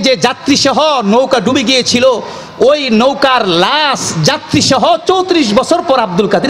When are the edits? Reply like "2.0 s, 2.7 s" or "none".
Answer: none